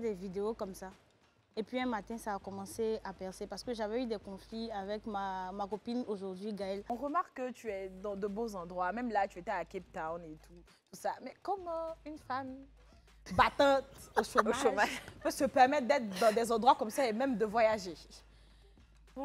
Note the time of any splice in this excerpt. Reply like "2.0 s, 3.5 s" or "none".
6.9 s